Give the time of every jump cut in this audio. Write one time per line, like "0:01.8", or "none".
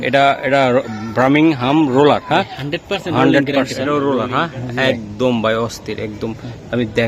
0:03.8